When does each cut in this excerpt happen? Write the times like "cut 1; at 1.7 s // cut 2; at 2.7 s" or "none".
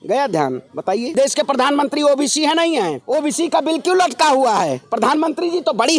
cut 1; at 1.1 s // cut 2; at 3.0 s